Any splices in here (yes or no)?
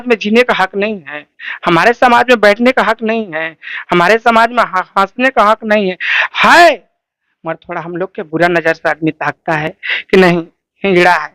no